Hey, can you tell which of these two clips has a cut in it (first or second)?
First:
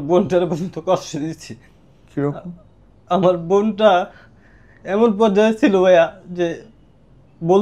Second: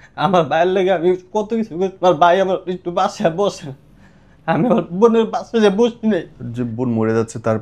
second